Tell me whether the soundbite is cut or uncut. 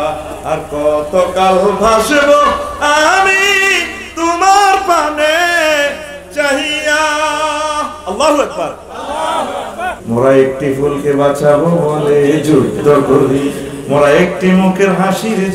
cut